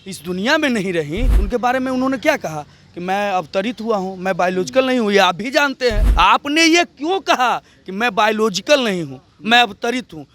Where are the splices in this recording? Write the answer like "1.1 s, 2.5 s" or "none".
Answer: 1.3 s, 6.0 s